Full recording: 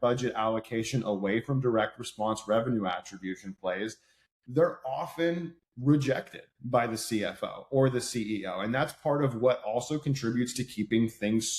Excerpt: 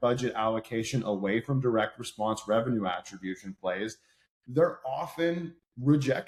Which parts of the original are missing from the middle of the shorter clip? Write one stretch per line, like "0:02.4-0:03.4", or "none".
none